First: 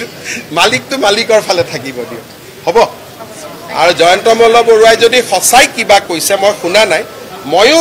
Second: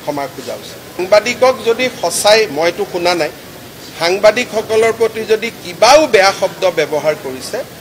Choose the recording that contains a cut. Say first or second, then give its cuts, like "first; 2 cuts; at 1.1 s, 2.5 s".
second; 1 cut; at 1.0 s